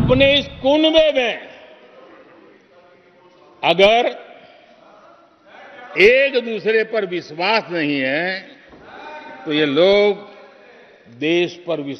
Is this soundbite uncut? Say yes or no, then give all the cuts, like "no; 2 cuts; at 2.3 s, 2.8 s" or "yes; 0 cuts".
yes; 0 cuts